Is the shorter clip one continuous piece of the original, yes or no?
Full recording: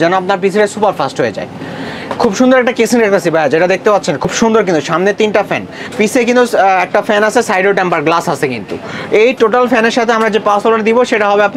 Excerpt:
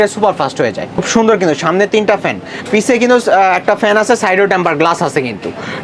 no